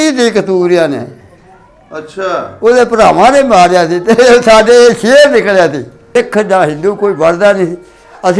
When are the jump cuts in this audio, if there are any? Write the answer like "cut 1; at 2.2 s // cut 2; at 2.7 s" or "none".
cut 1; at 6.1 s